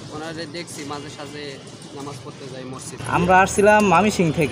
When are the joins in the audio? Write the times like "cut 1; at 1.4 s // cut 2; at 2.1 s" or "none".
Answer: cut 1; at 3.0 s